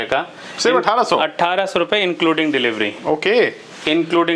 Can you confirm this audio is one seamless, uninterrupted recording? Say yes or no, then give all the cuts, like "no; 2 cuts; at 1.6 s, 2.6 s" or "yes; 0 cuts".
yes; 0 cuts